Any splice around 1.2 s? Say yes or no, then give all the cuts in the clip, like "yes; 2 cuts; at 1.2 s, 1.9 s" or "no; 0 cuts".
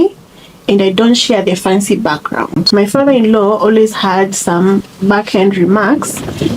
no; 2 cuts; at 2.6 s, 4.9 s